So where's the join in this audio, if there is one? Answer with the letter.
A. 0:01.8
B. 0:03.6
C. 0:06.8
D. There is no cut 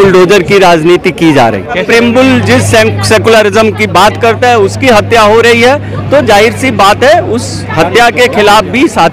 A